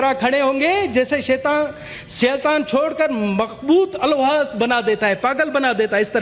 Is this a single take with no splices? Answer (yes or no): yes